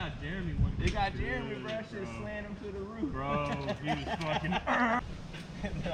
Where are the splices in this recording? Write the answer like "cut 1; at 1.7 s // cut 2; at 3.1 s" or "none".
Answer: none

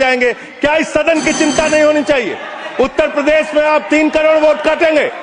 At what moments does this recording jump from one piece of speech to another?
none

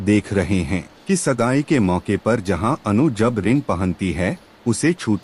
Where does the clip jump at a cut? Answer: cut 1; at 0.9 s

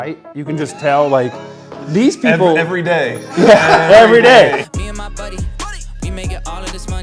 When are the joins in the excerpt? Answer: cut 1; at 4.7 s

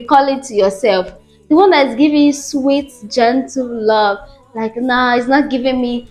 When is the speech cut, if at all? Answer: none

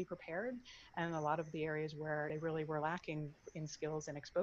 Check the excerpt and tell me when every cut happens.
cut 1; at 2.3 s

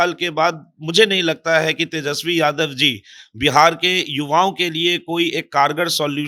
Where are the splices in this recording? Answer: none

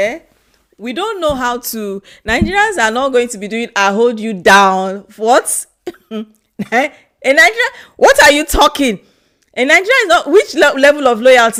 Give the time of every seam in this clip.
none

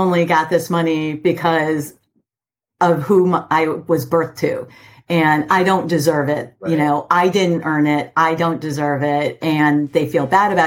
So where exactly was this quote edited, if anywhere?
none

